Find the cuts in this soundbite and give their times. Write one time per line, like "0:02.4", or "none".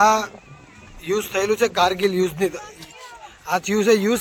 none